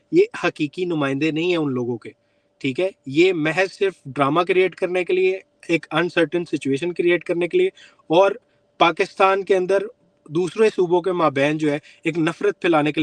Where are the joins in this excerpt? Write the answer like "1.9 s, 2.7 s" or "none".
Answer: none